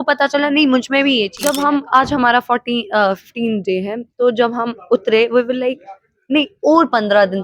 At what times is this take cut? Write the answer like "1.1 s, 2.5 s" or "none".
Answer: 1.3 s